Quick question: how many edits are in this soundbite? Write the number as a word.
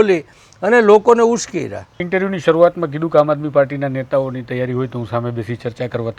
one